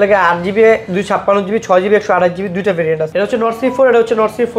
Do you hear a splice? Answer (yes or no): yes